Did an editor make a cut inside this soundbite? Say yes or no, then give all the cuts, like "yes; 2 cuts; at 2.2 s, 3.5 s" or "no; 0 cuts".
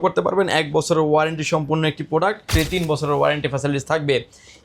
yes; 1 cut; at 2.5 s